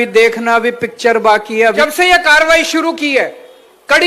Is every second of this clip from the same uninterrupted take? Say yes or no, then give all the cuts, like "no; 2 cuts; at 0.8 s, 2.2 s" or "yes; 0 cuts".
no; 1 cut; at 1.8 s